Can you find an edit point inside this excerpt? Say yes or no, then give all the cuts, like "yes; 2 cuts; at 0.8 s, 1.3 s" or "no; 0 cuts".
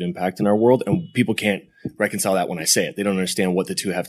yes; 1 cut; at 1.1 s